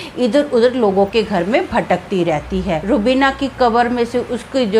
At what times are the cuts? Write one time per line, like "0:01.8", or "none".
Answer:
0:02.8